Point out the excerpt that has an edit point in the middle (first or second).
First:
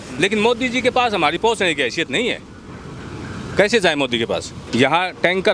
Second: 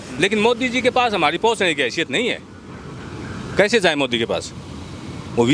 first